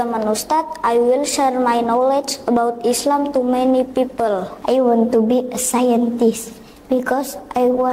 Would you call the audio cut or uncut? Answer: cut